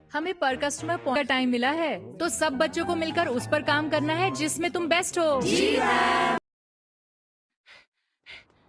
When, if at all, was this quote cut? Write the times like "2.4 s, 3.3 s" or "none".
none